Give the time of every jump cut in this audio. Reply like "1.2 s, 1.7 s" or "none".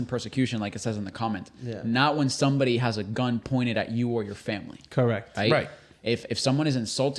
none